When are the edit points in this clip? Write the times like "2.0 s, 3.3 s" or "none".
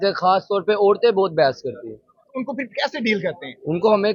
none